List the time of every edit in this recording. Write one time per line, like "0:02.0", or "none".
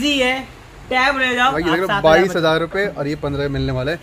0:01.6

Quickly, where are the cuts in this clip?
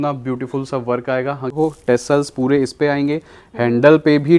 0:01.5

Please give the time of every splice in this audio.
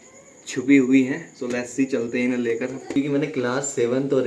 0:03.0

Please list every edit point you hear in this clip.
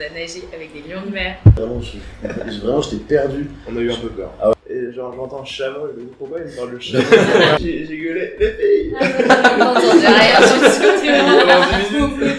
0:01.6
0:04.5
0:07.6

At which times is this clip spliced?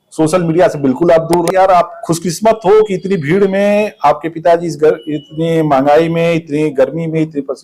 0:01.5

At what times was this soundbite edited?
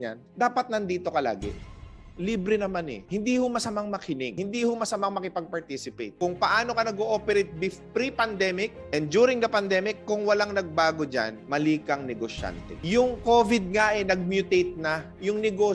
0:01.7
0:03.0
0:04.3
0:06.1
0:12.8

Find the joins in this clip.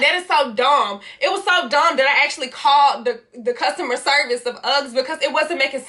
none

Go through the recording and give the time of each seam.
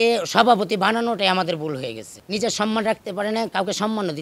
0:02.2

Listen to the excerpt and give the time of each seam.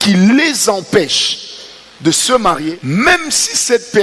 0:02.7

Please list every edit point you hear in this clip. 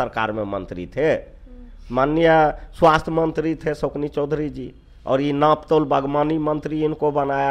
none

